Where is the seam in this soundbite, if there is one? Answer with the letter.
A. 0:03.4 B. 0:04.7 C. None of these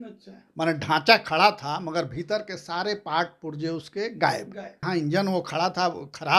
B